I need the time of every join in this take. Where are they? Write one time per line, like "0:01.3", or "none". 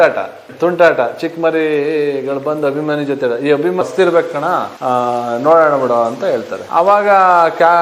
0:03.8